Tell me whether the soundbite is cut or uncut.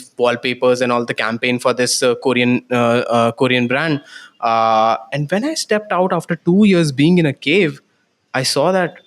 uncut